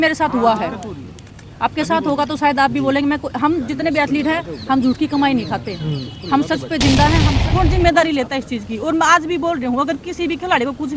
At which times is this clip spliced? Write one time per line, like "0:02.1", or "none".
0:07.3

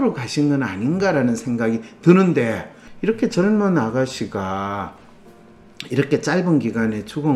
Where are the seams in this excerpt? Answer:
0:02.8

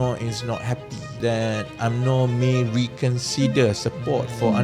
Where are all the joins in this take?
0:01.1

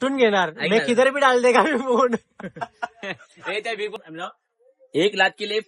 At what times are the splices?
0:04.0

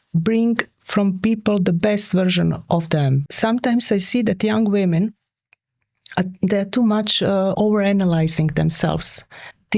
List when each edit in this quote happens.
0:03.2
0:07.5

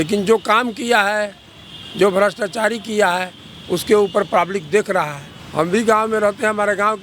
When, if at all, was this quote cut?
none

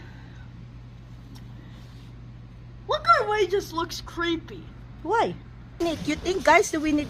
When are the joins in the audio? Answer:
0:05.8

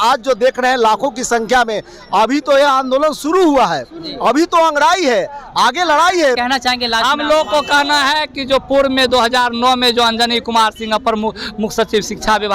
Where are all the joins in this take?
0:06.4

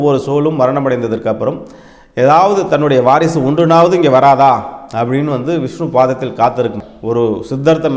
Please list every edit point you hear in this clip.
0:06.9

